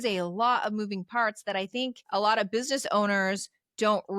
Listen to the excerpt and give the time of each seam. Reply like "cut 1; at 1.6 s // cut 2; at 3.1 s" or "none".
cut 1; at 2.0 s